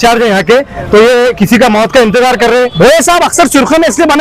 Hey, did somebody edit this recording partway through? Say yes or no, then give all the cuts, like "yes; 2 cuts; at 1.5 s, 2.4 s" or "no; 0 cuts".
yes; 1 cut; at 2.7 s